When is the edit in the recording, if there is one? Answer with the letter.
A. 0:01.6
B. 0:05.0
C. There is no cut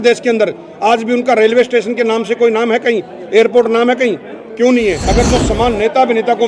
B